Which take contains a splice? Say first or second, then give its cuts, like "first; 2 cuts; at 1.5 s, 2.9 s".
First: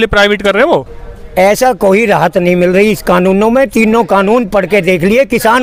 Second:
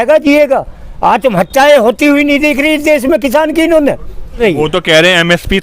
second; 1 cut; at 4.4 s